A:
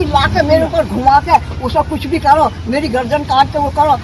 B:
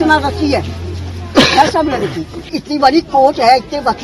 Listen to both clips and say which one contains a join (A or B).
B